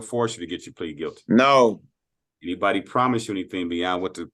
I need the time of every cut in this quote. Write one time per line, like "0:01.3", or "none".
none